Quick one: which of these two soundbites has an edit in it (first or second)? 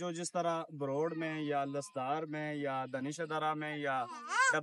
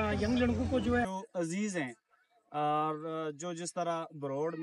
second